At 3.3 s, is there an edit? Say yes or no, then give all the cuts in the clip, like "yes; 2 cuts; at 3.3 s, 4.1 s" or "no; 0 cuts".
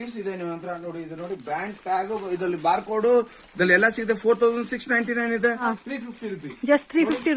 no; 1 cut; at 5.7 s